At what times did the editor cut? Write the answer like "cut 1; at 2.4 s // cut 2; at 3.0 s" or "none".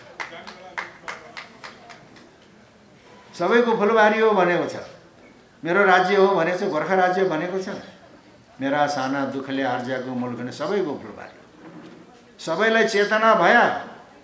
none